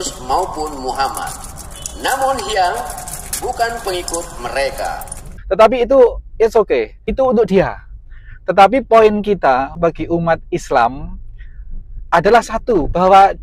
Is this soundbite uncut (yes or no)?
yes